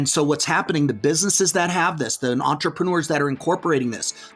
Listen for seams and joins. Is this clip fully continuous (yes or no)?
yes